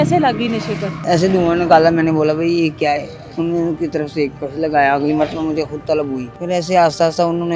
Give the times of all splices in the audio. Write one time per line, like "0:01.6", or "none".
0:01.0
0:06.3